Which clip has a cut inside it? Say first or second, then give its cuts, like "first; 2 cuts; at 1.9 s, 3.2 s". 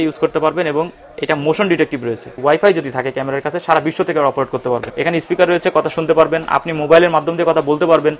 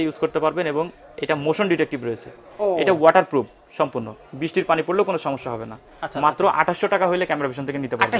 first; 2 cuts; at 2.3 s, 4.9 s